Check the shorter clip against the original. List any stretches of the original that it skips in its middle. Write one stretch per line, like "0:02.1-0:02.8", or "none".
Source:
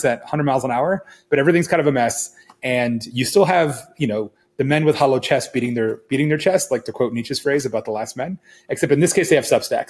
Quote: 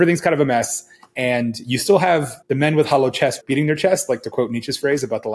0:03.8-0:04.4
0:05.5-0:06.0